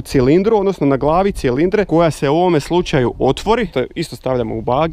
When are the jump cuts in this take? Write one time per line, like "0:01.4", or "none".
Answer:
0:01.9
0:03.7